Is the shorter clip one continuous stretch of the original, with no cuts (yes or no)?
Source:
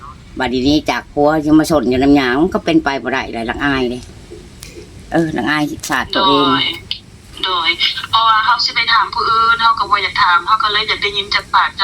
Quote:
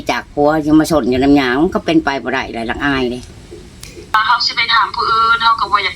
no